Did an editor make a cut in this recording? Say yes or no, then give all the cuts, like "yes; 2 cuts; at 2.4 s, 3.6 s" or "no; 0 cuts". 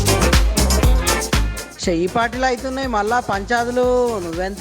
yes; 1 cut; at 1.2 s